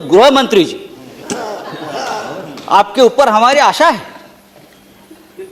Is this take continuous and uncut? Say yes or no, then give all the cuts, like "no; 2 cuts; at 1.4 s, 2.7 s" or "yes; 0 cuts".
yes; 0 cuts